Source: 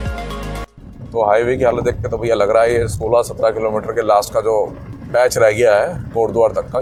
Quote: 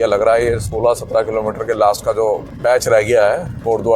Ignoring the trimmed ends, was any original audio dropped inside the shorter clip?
yes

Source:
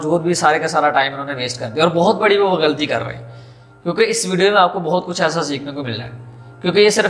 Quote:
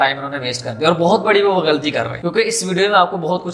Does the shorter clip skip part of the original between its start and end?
yes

